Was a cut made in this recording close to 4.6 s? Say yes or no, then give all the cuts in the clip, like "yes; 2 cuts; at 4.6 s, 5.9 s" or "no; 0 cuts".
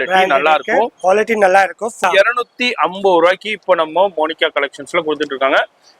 no; 1 cut; at 2.0 s